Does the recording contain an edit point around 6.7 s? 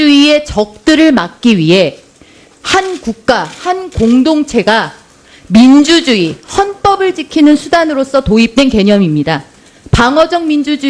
yes; 1 cut; at 6.7 s

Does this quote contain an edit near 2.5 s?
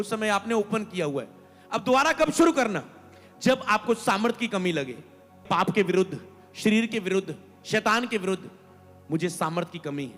no; 1 cut; at 5.4 s

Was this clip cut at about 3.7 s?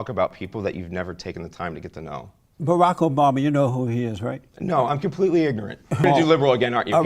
no; 2 cuts; at 2.4 s, 6.0 s

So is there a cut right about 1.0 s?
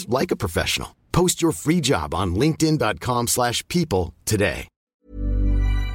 no; 1 cut; at 5.0 s

